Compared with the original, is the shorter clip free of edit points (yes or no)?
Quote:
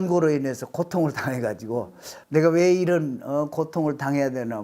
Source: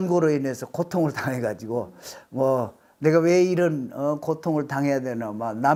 no